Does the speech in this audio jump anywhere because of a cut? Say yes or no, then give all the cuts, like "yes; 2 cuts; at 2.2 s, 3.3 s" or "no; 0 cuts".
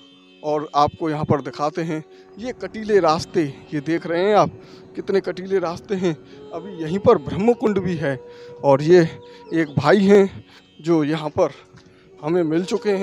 no; 0 cuts